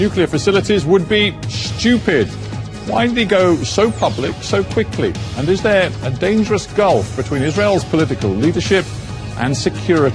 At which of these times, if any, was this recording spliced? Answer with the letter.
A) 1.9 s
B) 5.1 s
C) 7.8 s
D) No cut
B